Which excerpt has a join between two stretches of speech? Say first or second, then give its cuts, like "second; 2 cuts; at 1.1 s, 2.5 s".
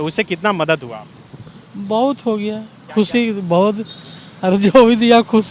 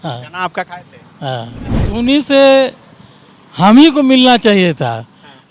second; 1 cut; at 1.8 s